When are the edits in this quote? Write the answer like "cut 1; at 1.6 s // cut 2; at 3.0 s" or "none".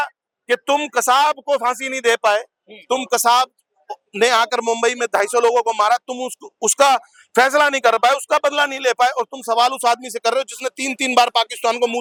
none